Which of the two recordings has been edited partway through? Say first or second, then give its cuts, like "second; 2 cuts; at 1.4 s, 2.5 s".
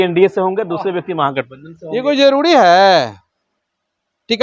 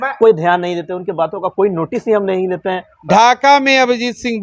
second; 1 cut; at 2.9 s